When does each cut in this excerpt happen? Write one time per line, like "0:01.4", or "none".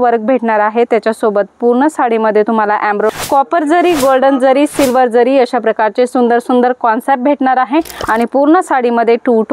0:03.1
0:08.0